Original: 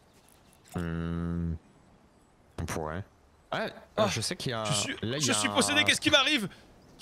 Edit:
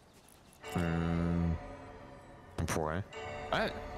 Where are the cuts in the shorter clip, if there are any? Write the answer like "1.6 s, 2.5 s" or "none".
none